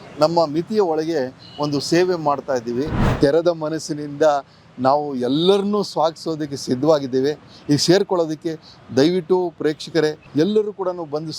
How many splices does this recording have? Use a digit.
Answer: 2